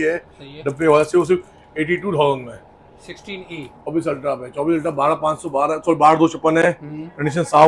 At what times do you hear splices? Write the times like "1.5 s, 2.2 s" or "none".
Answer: 3.9 s